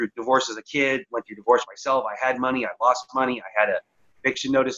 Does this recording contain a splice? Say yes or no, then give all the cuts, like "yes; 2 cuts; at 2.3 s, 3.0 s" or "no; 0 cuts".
no; 0 cuts